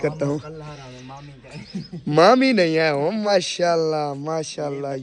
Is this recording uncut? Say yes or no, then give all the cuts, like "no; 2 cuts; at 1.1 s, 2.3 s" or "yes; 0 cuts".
no; 1 cut; at 3.3 s